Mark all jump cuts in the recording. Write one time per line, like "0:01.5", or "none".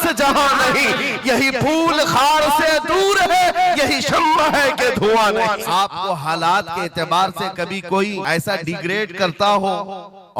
0:05.7
0:08.2